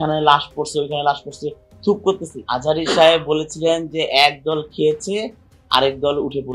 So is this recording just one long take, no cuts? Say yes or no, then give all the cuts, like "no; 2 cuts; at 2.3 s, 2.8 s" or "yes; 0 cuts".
no; 1 cut; at 2.3 s